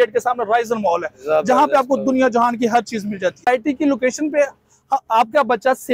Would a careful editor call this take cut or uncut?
cut